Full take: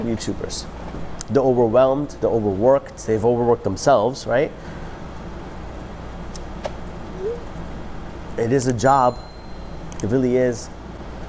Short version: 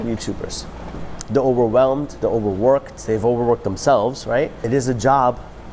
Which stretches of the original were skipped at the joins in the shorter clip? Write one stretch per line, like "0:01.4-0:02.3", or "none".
0:04.7-0:08.5

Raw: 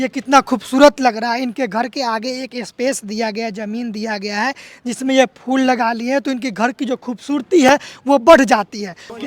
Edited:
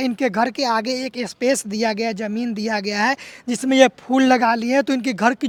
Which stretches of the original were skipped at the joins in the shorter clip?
none

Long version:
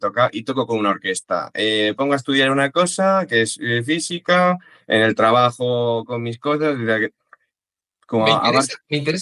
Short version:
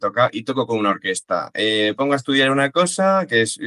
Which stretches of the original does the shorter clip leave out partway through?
none

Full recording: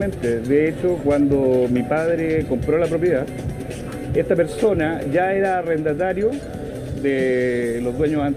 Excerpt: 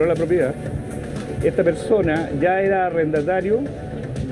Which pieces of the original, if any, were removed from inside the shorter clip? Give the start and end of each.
none

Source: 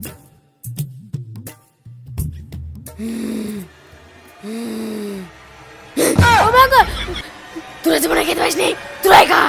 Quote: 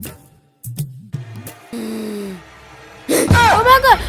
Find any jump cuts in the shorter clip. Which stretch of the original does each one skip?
0:01.7-0:04.6

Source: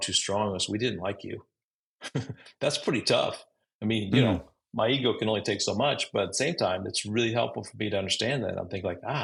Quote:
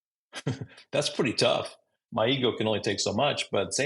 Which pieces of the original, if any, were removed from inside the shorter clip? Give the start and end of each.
0:03.6-0:04.6

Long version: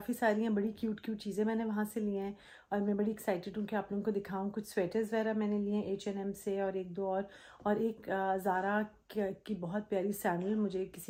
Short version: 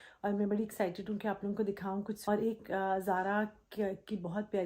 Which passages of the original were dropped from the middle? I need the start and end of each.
0:04.6-0:07.5

